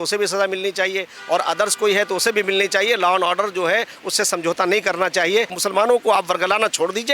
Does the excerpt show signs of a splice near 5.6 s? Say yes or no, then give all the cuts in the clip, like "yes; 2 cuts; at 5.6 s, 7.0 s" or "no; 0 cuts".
yes; 1 cut; at 5.6 s